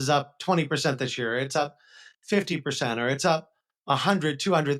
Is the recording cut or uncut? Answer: uncut